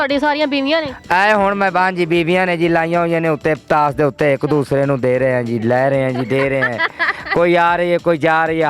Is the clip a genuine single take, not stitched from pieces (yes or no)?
yes